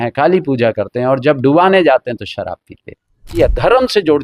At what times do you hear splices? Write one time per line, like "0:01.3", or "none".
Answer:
0:03.3